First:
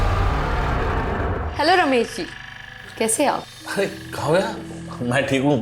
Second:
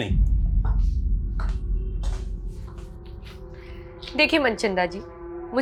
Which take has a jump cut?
first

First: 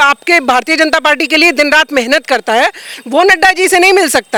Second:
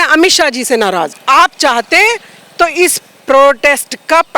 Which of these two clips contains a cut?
second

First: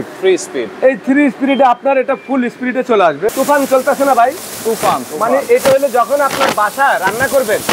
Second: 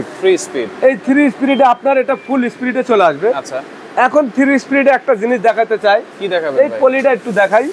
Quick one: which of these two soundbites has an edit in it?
first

